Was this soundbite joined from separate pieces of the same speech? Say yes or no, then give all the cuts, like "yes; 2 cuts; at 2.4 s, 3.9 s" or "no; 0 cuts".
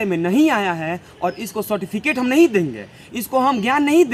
no; 0 cuts